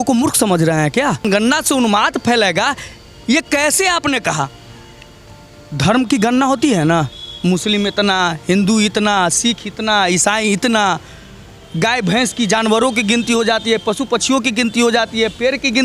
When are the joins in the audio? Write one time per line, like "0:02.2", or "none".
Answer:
0:01.2

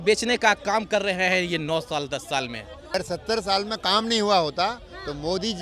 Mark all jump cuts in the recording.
0:02.9

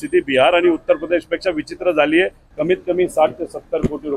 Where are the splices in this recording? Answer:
0:02.4

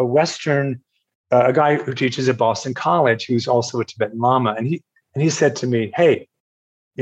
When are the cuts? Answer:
none

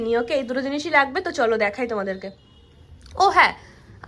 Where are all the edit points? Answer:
none

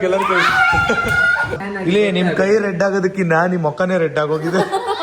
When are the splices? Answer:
0:01.6

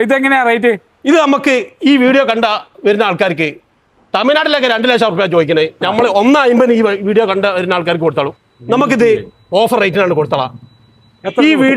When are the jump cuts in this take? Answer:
0:08.4

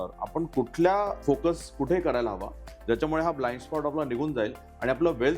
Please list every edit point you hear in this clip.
0:01.2

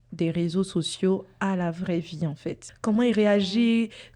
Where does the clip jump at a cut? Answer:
0:02.7

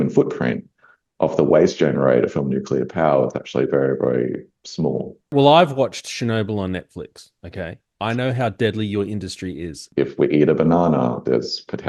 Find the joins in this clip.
0:05.3
0:09.8

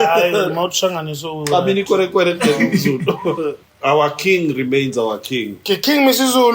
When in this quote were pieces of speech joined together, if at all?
0:03.7

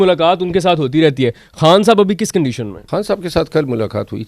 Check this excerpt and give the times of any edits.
0:02.7

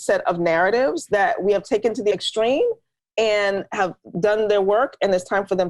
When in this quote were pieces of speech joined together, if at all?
0:01.0
0:02.1

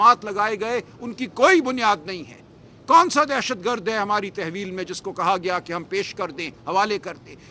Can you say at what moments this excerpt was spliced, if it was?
none

